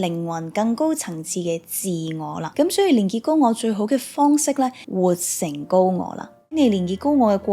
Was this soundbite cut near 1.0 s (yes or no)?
no